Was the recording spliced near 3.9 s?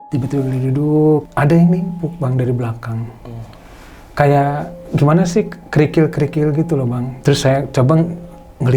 no; 2 cuts; at 1.3 s, 7.1 s

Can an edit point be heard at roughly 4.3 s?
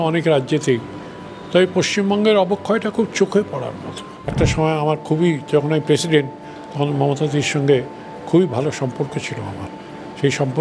yes; 1 cut; at 4.3 s

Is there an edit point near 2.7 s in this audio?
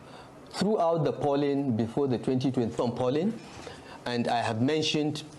yes; 1 cut; at 2.7 s

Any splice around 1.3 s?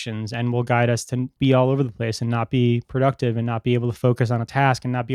yes; 1 cut; at 1.3 s

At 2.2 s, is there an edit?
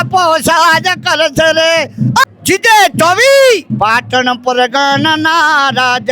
yes; 1 cut; at 2.2 s

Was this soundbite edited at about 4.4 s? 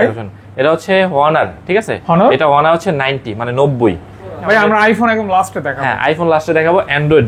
yes; 1 cut; at 4.4 s

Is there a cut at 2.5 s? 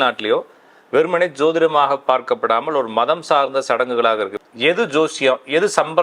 no; 1 cut; at 4.3 s

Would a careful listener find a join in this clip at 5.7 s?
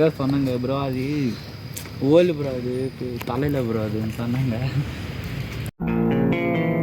yes; 1 cut; at 5.7 s

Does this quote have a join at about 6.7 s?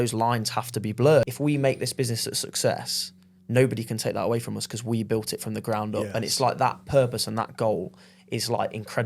no; 1 cut; at 1.3 s

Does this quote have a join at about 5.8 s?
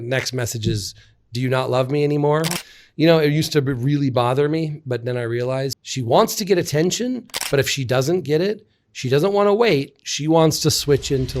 yes; 2 cuts; at 2.6 s, 5.8 s

